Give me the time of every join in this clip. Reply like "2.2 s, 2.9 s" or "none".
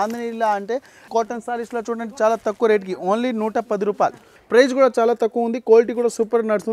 1.1 s, 4.2 s